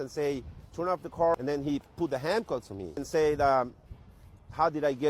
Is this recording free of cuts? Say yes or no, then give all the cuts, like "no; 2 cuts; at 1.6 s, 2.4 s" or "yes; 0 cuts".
no; 2 cuts; at 1.3 s, 3.0 s